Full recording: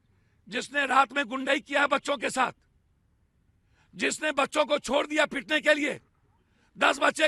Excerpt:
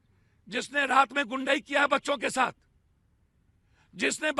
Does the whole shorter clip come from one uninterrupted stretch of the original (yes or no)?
yes